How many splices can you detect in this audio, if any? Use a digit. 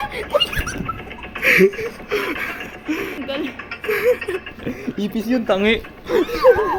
0